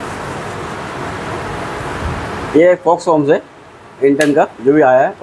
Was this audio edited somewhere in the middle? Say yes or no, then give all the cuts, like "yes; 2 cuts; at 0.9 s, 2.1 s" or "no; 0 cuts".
no; 0 cuts